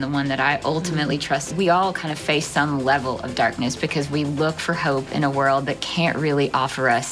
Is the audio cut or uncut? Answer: cut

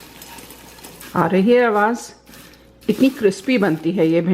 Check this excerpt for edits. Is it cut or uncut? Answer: cut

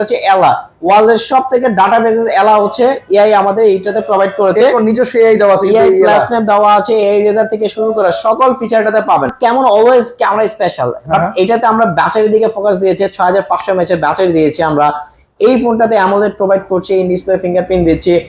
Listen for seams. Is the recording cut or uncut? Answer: cut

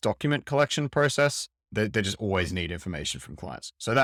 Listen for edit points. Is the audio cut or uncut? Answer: uncut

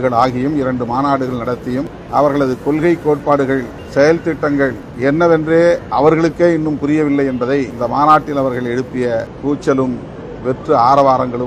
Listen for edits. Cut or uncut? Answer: cut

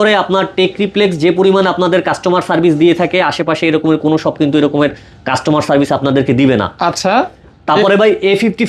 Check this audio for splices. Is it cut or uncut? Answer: uncut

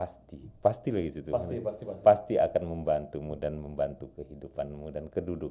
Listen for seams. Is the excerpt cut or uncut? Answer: uncut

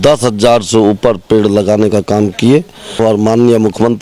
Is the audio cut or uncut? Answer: cut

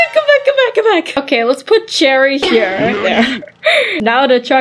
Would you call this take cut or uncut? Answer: uncut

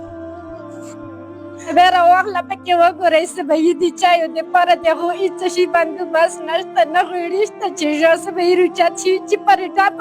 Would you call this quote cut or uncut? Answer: cut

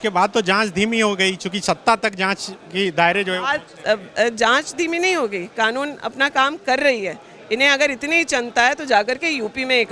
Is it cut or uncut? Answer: uncut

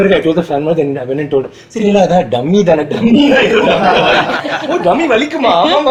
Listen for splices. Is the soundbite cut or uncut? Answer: uncut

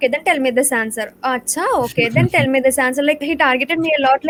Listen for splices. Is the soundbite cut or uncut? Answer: uncut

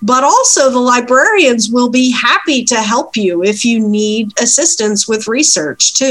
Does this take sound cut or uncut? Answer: uncut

